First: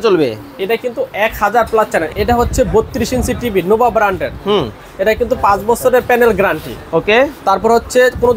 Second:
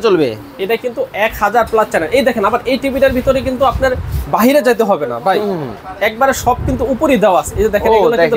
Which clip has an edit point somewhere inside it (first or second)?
first